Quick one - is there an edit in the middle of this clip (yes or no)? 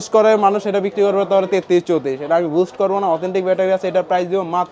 no